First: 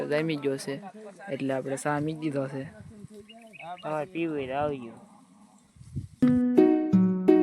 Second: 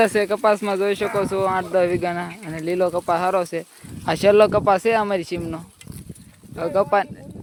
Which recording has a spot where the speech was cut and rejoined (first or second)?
first